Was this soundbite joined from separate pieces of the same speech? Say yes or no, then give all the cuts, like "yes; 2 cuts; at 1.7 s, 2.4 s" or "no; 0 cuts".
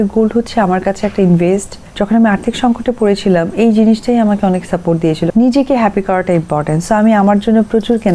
yes; 2 cuts; at 1.8 s, 5.3 s